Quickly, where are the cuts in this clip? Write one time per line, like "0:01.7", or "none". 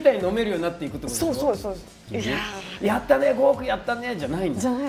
0:02.0